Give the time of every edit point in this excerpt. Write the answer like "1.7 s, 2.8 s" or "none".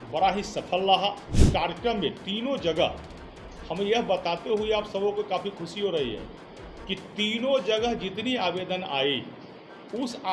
1.4 s